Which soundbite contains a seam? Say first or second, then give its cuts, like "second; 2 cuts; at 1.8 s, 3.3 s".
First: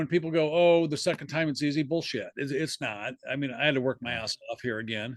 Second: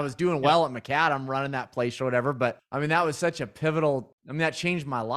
second; 2 cuts; at 2.6 s, 4.2 s